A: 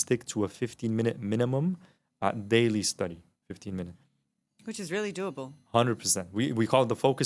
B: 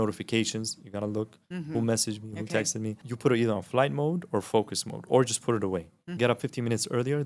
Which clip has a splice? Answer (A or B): B